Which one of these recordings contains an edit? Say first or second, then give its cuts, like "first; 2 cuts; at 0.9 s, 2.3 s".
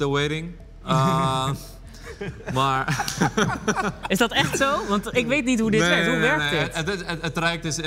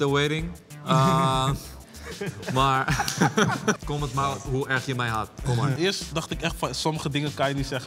second; 2 cuts; at 3.8 s, 5.8 s